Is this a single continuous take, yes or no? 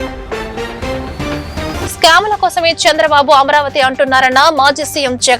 no